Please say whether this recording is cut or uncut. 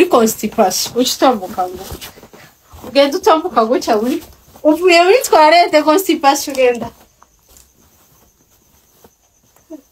uncut